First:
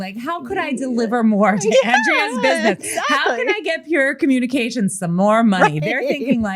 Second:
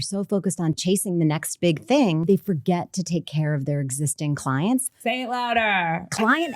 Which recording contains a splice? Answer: second; 3 cuts; at 0.8 s, 2.2 s, 4.9 s

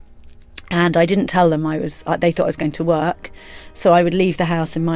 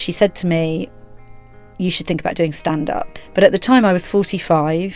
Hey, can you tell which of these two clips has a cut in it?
second; 1 cut; at 3.2 s

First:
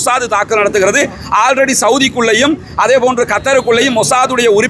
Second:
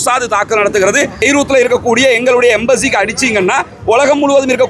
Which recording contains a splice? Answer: second; 1 cut; at 1.2 s

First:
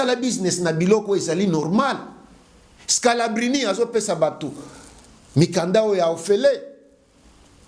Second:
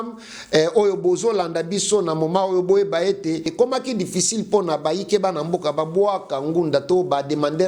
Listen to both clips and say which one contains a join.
second; 1 cut; at 3.5 s

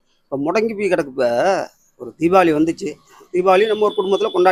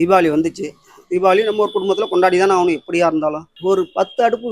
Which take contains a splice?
second; 1 cut; at 3.5 s

